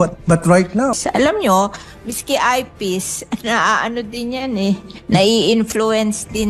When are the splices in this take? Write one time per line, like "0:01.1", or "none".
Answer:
0:00.9